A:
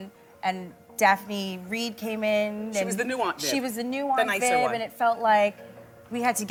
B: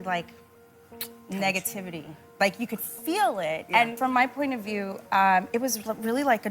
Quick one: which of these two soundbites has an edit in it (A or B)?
B